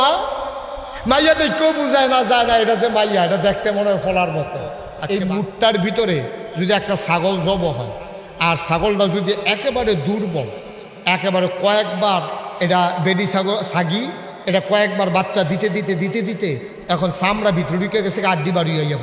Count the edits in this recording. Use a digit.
1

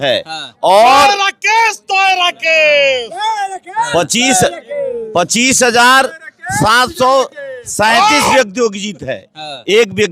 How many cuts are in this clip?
0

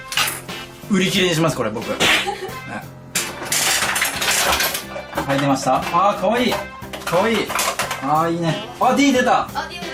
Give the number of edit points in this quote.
1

